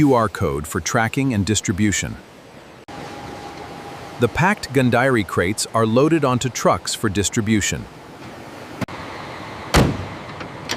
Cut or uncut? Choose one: uncut